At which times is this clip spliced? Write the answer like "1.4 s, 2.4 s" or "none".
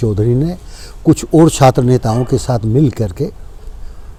none